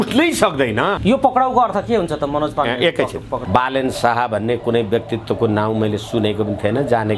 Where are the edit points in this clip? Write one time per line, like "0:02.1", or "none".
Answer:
0:01.0
0:03.3

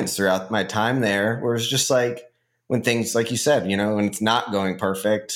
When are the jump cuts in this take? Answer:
none

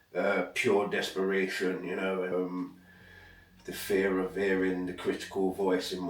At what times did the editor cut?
0:02.3

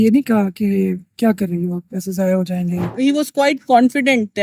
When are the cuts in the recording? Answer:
0:02.9

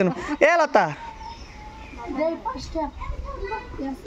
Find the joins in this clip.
none

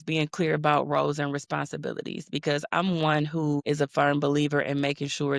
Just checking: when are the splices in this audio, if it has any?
none

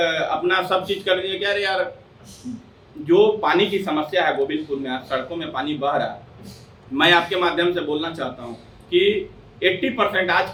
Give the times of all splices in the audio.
none

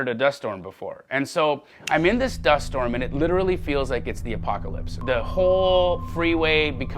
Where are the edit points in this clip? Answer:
0:05.0

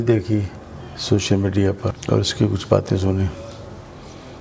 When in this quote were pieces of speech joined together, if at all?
0:02.0

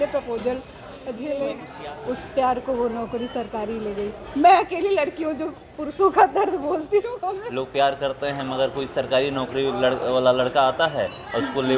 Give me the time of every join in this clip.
0:01.7
0:07.4

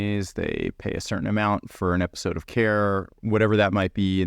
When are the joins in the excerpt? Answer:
0:03.1

